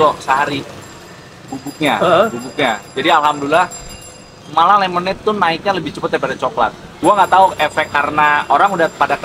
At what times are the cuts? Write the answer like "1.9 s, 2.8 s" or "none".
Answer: none

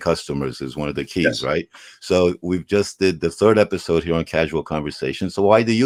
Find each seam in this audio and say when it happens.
none

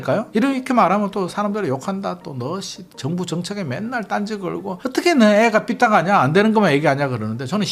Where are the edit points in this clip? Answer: none

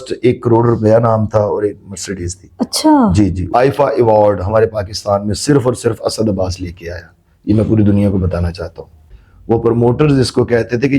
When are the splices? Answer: 3.4 s, 9.1 s

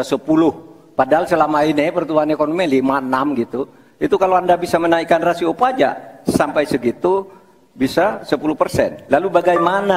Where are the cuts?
none

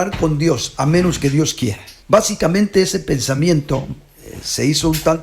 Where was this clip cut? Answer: 1.9 s

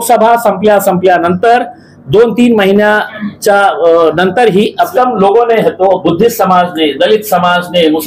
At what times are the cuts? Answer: 4.9 s

